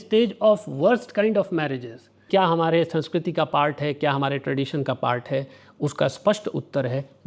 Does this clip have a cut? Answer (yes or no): yes